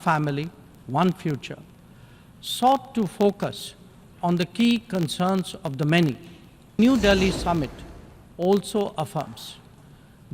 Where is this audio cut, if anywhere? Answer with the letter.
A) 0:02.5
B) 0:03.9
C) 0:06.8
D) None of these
C